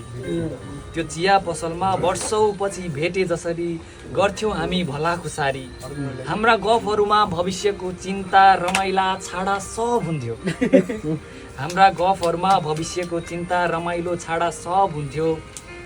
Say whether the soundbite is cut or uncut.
uncut